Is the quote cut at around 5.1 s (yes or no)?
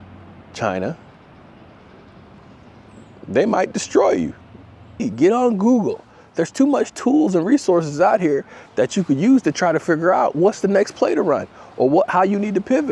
yes